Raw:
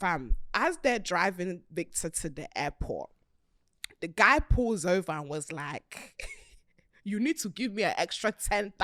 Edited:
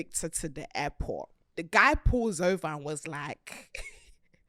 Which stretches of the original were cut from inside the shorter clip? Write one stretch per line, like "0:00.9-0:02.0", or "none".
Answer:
0:03.2-0:03.8